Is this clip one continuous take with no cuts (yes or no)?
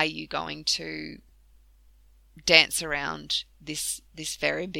yes